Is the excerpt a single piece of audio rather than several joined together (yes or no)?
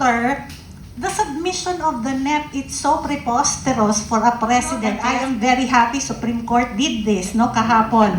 no